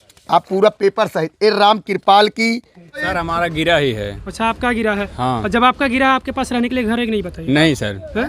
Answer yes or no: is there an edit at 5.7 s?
no